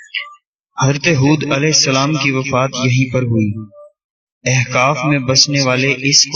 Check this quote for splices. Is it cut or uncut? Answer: uncut